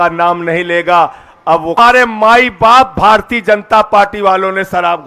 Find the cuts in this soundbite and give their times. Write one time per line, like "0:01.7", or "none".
0:01.8